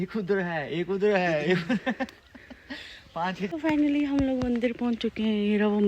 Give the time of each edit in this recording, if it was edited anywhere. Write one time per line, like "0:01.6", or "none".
0:03.5